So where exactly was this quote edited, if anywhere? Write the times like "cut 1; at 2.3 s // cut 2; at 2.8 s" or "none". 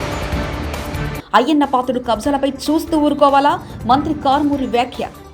none